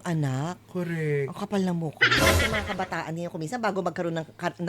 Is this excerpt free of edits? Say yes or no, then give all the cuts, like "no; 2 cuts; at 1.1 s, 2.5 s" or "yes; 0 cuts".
no; 1 cut; at 2.2 s